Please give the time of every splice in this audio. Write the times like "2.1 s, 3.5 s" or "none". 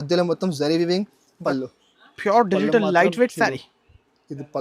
1.3 s